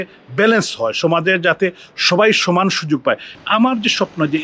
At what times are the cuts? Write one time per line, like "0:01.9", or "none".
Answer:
0:03.3